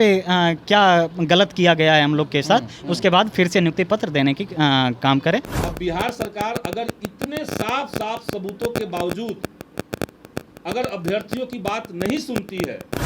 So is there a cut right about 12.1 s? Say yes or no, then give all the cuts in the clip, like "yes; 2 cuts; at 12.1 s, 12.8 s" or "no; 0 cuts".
no; 1 cut; at 5.6 s